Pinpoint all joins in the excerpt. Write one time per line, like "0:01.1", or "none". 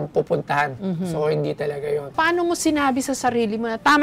0:02.1